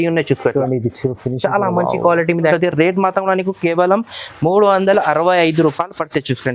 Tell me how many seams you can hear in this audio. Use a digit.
1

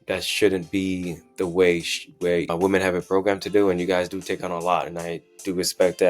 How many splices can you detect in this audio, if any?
1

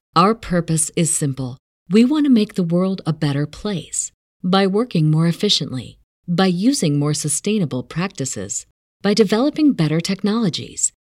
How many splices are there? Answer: 0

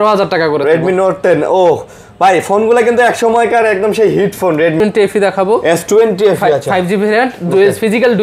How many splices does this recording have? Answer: 1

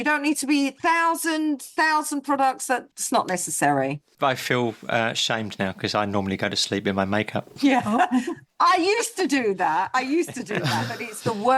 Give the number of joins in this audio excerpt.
2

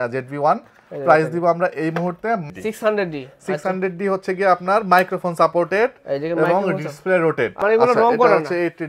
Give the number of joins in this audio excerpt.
2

